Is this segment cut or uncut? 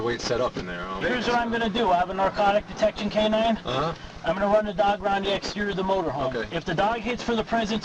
cut